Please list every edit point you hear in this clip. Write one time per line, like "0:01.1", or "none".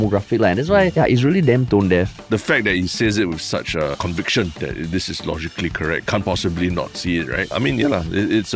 0:00.9
0:02.2
0:04.4
0:06.0
0:07.5